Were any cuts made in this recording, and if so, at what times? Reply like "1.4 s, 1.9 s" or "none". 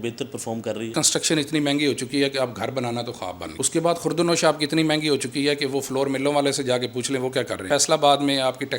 0.9 s, 3.4 s, 7.7 s